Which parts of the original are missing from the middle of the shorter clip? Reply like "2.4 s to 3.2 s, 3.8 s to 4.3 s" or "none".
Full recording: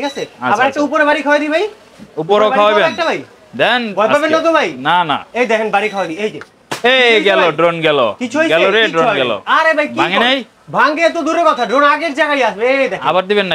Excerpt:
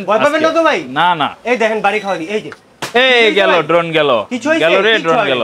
none